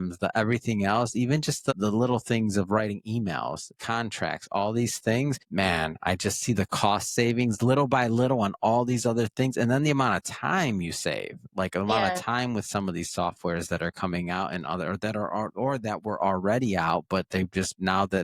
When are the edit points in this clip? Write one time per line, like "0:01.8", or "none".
none